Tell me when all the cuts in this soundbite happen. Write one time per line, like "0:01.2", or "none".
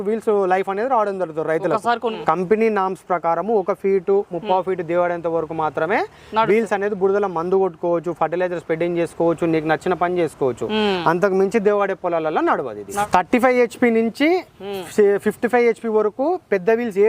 0:02.2
0:13.0